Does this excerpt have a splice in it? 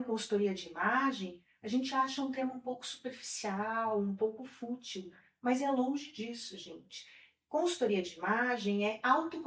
no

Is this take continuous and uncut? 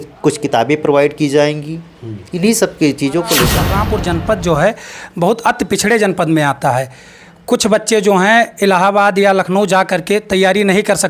no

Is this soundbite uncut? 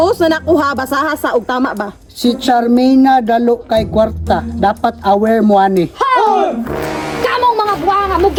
yes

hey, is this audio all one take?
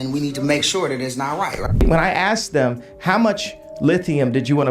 no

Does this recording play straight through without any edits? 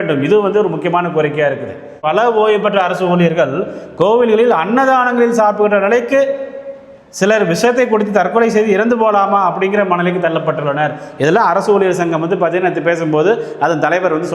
no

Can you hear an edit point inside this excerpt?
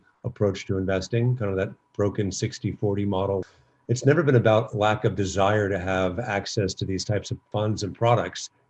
yes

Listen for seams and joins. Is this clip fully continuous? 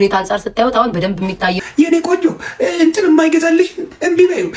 no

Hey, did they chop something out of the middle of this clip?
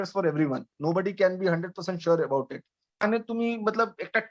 yes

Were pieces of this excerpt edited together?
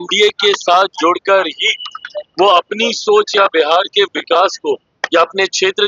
no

